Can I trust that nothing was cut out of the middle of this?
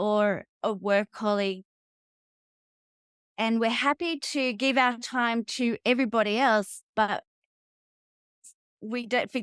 yes; 0 cuts

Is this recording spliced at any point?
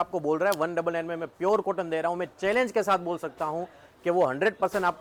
no; 0 cuts

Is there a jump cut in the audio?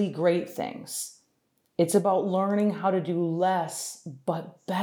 no; 0 cuts

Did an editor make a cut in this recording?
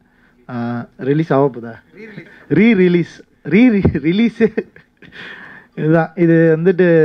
no; 0 cuts

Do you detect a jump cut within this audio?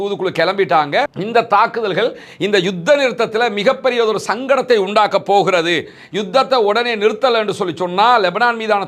yes; 1 cut; at 1.2 s

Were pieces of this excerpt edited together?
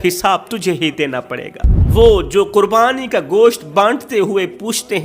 yes; 1 cut; at 1.7 s

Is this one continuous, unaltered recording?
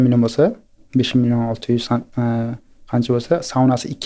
yes; 0 cuts

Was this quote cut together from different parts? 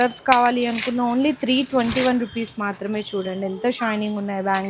no; 0 cuts

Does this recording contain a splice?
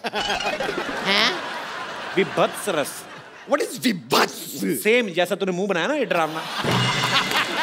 no; 0 cuts

